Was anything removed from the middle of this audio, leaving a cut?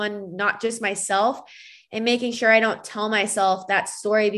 no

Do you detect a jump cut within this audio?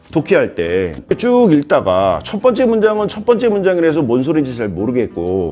yes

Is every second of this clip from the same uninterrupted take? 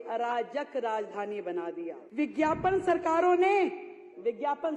no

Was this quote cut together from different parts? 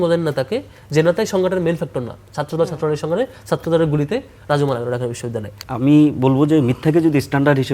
yes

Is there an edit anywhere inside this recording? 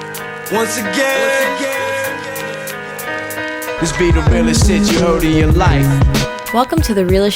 no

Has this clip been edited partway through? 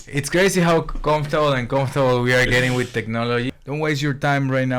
yes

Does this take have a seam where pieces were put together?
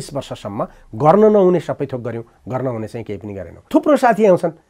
yes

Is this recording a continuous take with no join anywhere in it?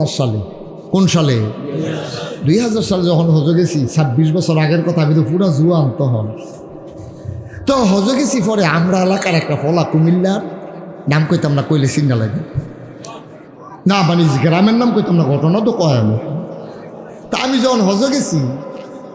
yes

